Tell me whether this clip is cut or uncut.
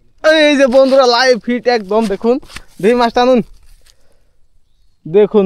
uncut